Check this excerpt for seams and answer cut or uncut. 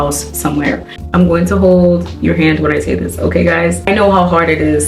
cut